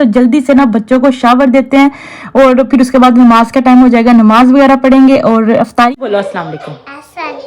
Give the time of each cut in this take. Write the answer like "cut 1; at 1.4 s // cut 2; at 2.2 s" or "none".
cut 1; at 5.9 s